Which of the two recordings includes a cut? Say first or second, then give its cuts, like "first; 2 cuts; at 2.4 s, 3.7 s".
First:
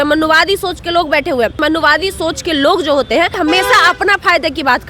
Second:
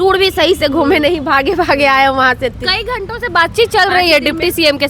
first; 2 cuts; at 1.6 s, 3.4 s